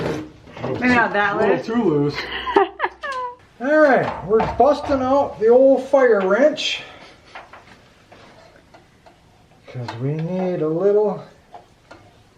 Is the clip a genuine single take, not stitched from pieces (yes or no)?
no